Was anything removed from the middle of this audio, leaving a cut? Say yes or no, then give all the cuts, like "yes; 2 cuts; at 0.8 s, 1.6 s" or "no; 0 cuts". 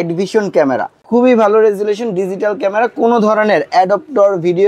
yes; 1 cut; at 1.1 s